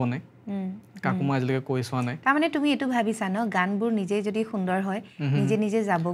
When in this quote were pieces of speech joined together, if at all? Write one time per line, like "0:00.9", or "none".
none